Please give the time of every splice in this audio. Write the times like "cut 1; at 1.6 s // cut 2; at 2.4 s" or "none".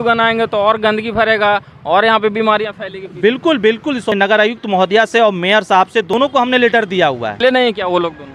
cut 1; at 4.1 s // cut 2; at 6.1 s // cut 3; at 7.4 s